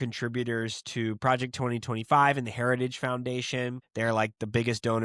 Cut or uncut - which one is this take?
cut